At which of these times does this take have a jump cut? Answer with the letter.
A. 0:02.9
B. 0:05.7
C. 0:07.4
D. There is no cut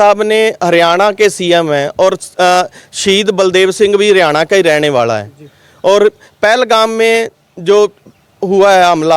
D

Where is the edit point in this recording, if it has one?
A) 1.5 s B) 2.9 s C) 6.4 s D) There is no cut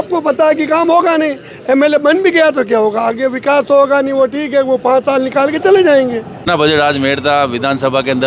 C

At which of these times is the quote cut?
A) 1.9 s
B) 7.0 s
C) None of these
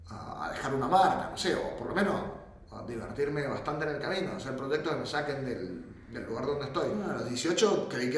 B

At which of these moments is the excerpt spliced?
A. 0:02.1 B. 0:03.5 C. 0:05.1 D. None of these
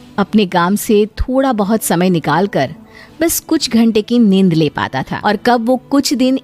C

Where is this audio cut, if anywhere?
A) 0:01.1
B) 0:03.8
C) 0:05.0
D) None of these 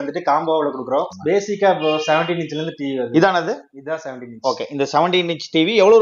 A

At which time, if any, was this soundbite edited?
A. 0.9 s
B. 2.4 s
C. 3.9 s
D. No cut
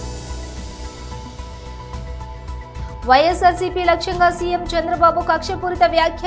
A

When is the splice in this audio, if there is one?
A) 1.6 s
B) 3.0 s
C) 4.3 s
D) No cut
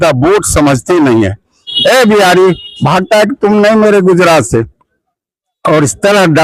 A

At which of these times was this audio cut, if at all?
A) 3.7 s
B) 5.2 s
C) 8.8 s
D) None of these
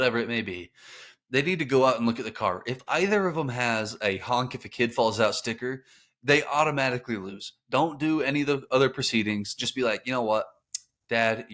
D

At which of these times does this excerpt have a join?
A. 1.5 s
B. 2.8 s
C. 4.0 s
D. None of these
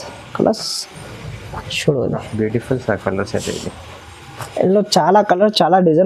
D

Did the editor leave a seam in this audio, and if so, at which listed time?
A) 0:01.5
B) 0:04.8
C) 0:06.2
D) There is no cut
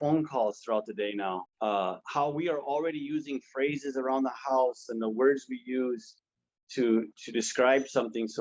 A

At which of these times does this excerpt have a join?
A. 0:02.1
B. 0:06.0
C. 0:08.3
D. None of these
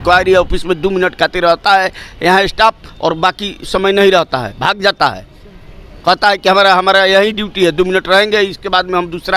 D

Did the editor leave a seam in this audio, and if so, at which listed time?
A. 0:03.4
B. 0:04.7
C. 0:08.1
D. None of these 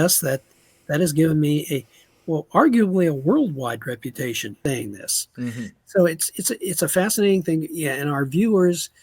B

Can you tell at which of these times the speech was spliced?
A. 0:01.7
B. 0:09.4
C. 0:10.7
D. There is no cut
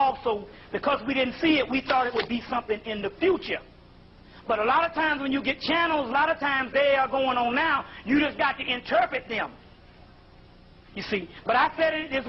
B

